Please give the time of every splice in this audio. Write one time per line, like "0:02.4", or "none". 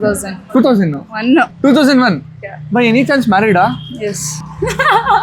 0:01.5